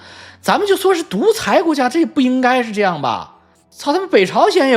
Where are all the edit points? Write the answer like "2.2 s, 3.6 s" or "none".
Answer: none